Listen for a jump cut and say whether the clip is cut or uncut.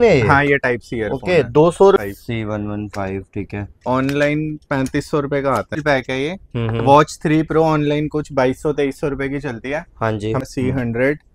cut